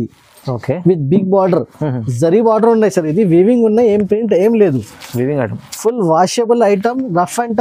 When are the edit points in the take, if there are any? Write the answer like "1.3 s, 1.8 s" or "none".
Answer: none